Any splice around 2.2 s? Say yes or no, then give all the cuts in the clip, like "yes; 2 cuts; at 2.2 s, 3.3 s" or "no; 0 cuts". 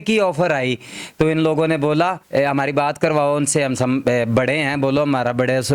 yes; 1 cut; at 2.2 s